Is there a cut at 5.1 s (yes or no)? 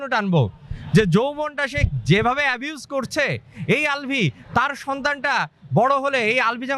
no